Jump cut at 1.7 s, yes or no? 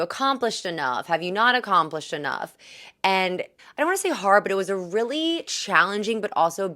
no